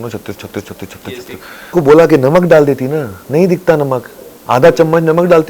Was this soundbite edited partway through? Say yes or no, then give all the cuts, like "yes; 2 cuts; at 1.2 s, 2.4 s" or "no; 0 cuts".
yes; 1 cut; at 1.7 s